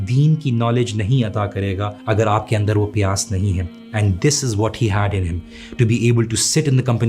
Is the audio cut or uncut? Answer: cut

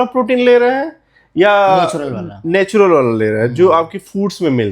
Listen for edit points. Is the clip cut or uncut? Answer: uncut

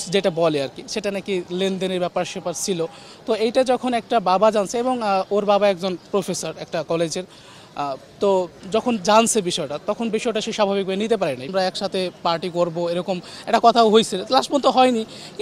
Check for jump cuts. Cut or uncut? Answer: cut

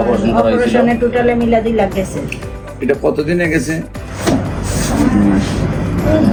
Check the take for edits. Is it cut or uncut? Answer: uncut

